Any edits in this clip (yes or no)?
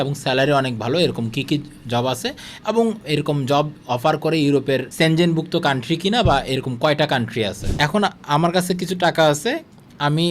yes